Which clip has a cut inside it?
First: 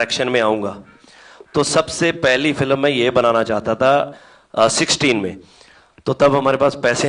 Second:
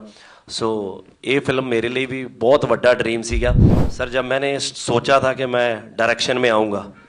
second; 1 cut; at 3.8 s

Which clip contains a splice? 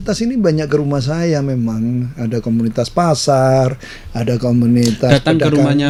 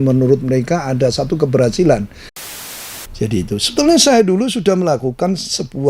second; 1 cut; at 2.6 s

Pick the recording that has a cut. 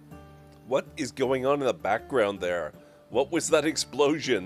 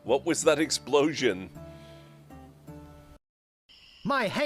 second; 1 cut; at 3.5 s

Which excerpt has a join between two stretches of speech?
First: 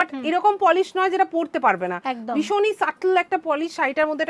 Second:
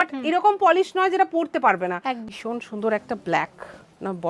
second; 1 cut; at 2.2 s

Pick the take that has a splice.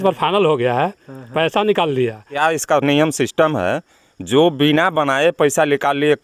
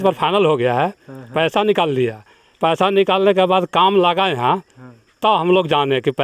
first; 1 cut; at 2.4 s

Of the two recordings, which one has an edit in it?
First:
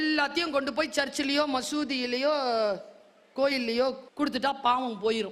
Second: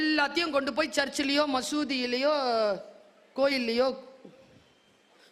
first; 1 cut; at 4.1 s

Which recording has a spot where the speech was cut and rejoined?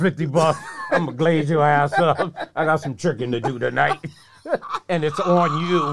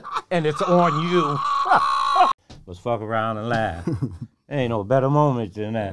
second; 1 cut; at 2.4 s

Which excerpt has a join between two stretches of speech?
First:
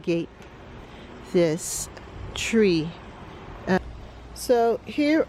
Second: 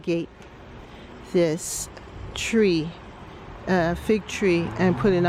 first; 1 cut; at 3.8 s

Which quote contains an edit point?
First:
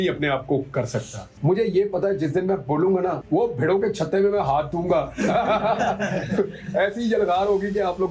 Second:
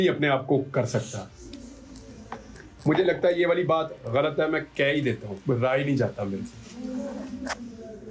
first; 2 cuts; at 1.2 s, 3.2 s

